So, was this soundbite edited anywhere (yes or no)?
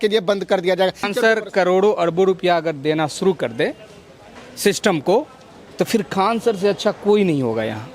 yes